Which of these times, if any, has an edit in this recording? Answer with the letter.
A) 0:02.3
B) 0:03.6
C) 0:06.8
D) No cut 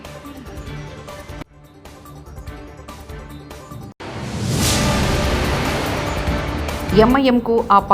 C